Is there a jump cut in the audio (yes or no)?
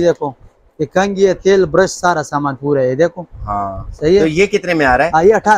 no